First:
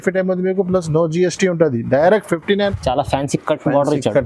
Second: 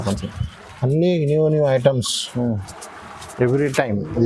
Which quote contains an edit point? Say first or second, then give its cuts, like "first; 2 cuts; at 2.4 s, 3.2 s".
first; 1 cut; at 2.7 s